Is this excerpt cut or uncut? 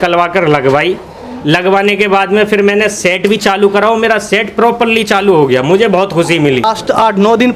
cut